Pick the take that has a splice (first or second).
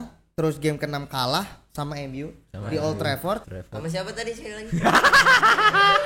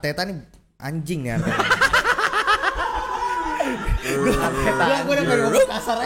first